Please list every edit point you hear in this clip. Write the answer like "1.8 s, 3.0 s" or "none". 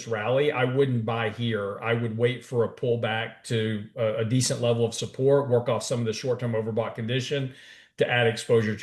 none